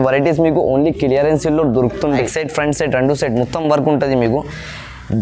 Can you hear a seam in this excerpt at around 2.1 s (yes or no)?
yes